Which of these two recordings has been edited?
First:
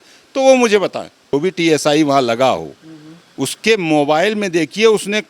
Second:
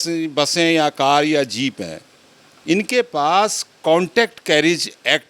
first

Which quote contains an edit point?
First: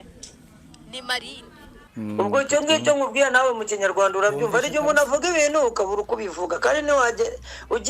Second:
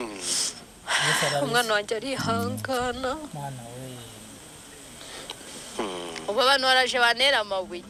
first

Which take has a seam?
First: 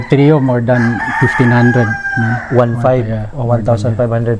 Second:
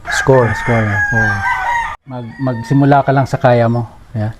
second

